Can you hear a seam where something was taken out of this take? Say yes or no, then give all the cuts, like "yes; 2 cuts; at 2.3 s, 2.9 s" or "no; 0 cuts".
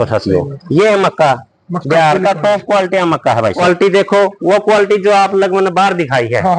yes; 1 cut; at 3.6 s